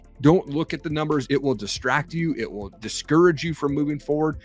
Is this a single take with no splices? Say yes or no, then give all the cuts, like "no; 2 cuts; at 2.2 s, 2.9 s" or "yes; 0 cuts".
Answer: no; 1 cut; at 1.2 s